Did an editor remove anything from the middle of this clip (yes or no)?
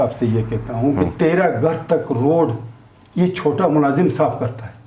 no